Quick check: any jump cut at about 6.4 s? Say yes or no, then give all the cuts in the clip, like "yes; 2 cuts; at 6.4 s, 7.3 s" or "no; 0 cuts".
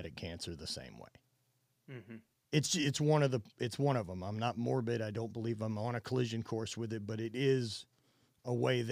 no; 0 cuts